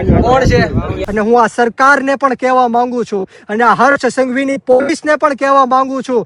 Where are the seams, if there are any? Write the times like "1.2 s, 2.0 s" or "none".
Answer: 1.0 s